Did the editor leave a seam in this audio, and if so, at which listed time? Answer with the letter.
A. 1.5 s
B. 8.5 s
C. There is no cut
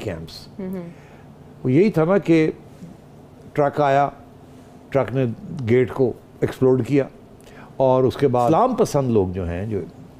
B